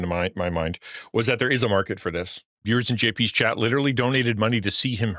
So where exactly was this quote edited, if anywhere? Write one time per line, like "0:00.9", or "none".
0:02.5